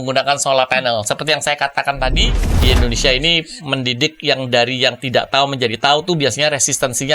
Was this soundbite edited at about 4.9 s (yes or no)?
no